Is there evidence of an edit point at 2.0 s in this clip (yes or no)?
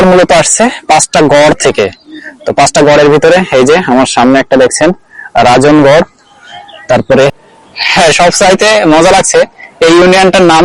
no